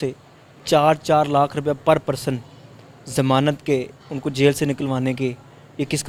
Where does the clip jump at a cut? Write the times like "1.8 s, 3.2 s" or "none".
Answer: none